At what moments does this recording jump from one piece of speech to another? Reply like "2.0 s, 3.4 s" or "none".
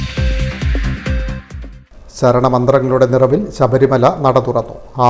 none